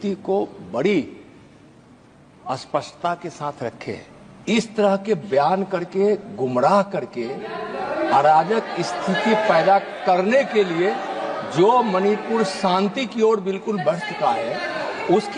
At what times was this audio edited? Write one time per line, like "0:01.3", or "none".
none